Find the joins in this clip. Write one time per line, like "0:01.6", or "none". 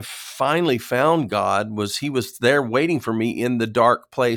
none

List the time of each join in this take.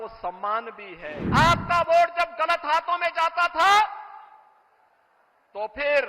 0:01.2

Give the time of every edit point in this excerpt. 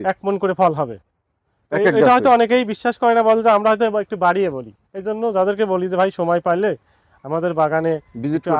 none

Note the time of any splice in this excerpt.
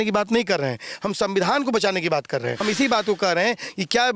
0:02.6

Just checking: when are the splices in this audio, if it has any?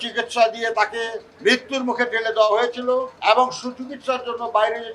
0:01.3
0:03.1

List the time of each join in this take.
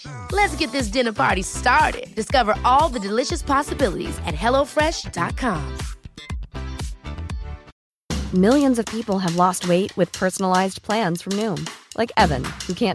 0:07.7

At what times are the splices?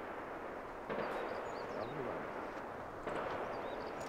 none

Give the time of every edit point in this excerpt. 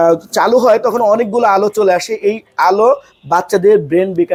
none

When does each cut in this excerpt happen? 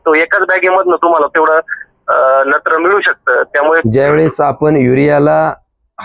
0:03.8

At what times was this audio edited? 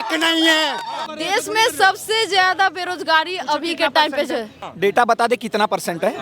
0:01.0
0:04.6

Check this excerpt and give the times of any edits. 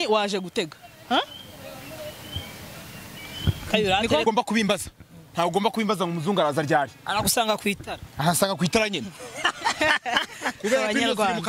0:04.2

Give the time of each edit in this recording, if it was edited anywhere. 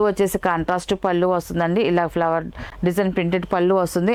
none

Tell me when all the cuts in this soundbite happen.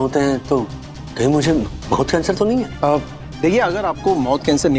0:02.7

